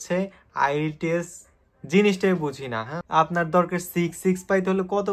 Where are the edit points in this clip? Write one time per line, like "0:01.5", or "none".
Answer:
0:02.9